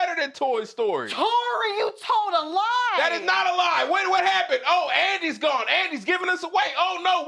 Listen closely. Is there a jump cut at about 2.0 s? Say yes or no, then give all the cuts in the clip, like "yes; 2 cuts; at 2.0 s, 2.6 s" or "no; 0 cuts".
no; 0 cuts